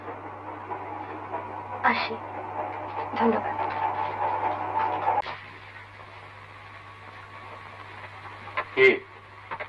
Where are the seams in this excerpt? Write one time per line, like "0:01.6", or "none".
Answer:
0:05.2

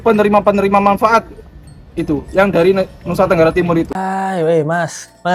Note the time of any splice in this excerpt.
none

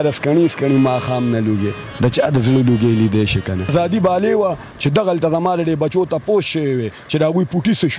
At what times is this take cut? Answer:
0:03.7

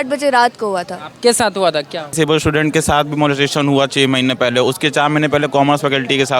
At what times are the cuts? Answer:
0:02.1

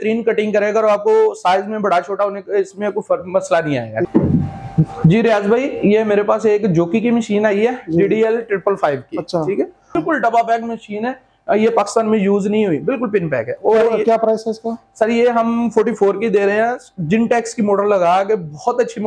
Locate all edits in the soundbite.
0:04.1
0:10.0

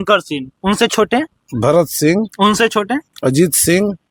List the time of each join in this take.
none

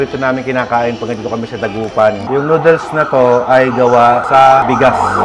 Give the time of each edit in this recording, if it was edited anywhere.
none

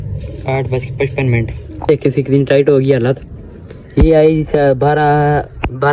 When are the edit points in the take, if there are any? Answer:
0:01.8

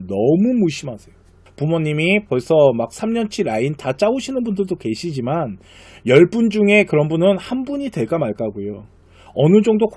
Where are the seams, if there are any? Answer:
0:01.4

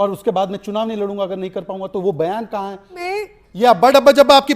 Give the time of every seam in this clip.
0:03.0

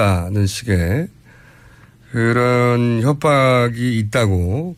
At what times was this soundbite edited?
none

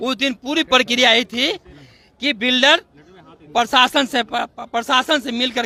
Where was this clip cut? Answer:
none

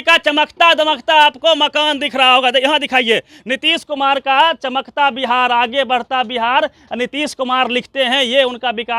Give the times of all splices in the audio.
none

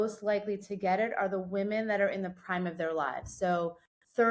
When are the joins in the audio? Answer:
none

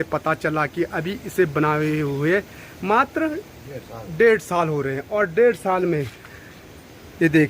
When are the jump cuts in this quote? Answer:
none

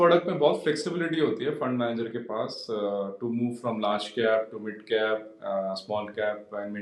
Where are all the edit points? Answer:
none

